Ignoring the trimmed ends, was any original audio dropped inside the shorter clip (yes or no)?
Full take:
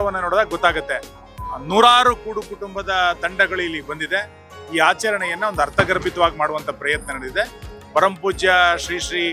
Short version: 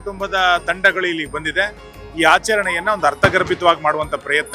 no